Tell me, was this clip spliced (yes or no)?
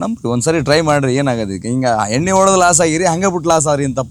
no